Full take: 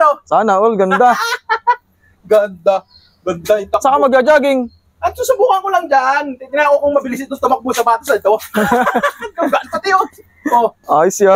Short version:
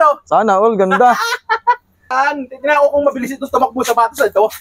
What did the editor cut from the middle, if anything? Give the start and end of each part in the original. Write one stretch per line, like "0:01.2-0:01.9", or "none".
0:02.1-0:06.0